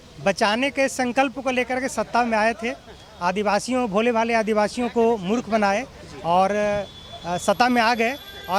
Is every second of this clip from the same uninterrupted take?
yes; 0 cuts

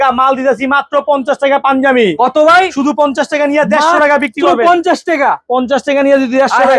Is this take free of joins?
yes; 0 cuts

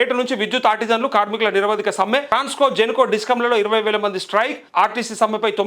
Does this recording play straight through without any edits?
no; 2 cuts; at 2.3 s, 4.6 s

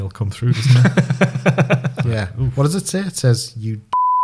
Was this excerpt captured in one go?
yes; 0 cuts

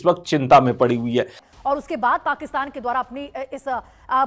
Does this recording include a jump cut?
yes; 1 cut; at 1.4 s

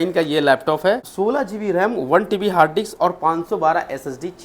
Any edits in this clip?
yes; 1 cut; at 1.1 s

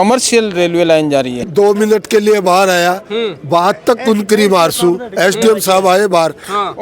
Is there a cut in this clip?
yes; 1 cut; at 1.4 s

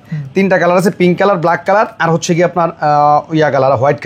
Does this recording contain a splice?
no; 0 cuts

